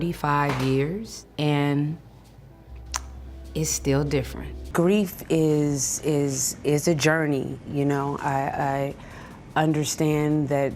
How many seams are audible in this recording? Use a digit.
1